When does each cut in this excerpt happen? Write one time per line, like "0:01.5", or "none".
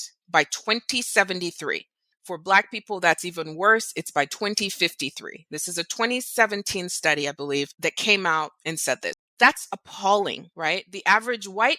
0:07.7
0:09.1
0:10.5

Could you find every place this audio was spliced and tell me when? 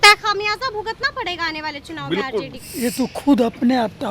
0:02.6

